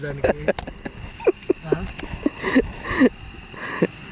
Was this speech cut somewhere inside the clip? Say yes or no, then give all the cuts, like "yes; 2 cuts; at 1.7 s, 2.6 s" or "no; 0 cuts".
no; 0 cuts